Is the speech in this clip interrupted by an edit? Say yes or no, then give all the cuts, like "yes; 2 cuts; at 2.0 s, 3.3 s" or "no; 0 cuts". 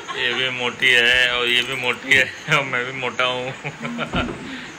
no; 0 cuts